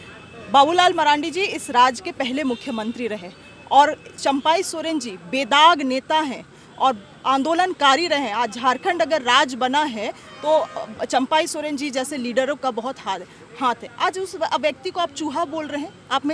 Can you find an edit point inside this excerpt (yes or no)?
no